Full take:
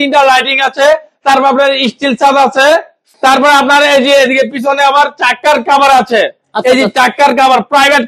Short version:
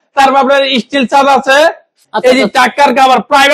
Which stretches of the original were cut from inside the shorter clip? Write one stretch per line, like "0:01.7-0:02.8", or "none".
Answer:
0:03.1-0:06.4